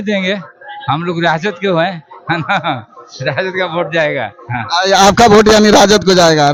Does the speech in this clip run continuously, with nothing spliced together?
yes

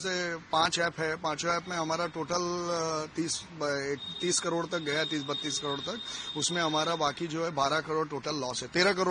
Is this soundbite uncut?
yes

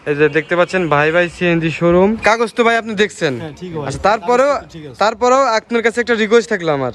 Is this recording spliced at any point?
yes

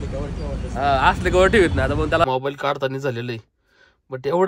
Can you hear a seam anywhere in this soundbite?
yes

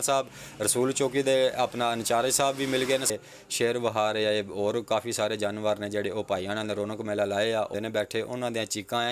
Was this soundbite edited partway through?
yes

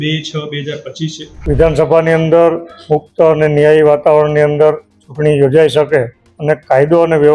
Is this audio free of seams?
no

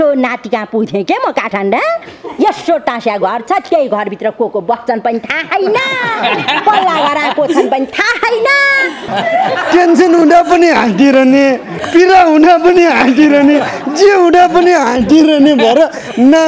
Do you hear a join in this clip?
yes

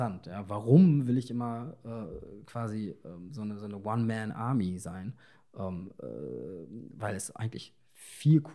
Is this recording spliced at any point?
no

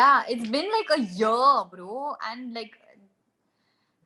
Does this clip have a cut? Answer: no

